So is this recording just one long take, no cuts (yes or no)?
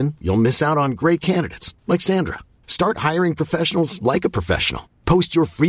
yes